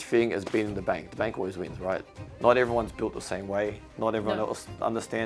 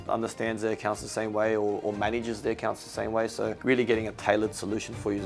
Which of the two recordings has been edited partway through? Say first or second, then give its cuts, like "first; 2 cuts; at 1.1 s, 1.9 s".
first; 1 cut; at 2.2 s